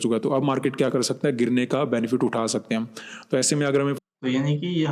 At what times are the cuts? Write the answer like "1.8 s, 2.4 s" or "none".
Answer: none

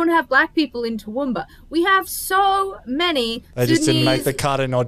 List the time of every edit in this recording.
none

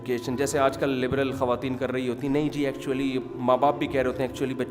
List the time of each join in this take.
none

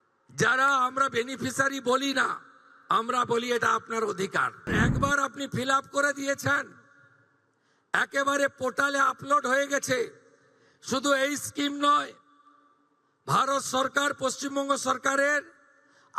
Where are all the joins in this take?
4.7 s

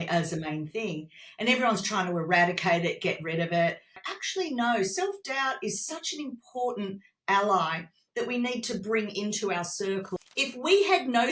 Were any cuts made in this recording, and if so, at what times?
4.0 s, 10.1 s

